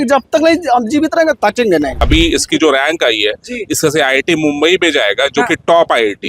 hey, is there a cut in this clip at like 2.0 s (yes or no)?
yes